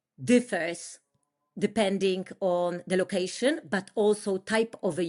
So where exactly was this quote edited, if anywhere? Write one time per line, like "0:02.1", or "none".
none